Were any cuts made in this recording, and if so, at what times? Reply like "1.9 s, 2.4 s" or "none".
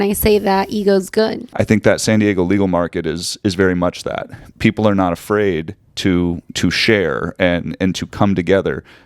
1.4 s